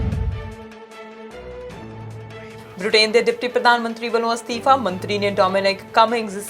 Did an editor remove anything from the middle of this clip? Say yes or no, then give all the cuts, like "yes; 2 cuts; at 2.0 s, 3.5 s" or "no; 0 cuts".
yes; 2 cuts; at 1.6 s, 2.6 s